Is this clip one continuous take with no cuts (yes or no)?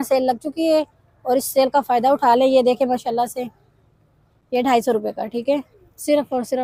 yes